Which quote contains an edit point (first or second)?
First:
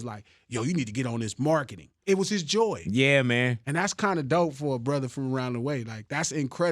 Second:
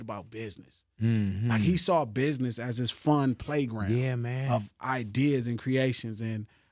first